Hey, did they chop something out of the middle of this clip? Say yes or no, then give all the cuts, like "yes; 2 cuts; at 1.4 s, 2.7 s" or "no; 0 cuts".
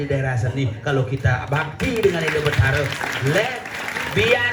no; 0 cuts